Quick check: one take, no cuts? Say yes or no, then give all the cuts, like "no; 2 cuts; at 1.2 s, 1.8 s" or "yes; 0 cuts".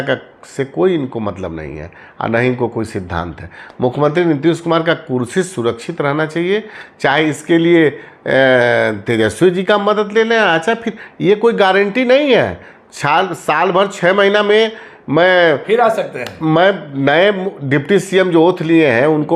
yes; 0 cuts